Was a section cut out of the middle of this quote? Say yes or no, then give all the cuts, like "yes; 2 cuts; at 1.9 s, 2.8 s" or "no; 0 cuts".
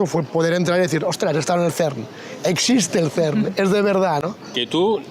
yes; 1 cut; at 4.2 s